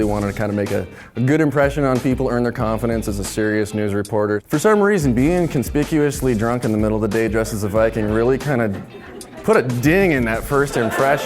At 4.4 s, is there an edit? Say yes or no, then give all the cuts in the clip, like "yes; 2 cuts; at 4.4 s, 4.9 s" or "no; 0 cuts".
yes; 1 cut; at 4.4 s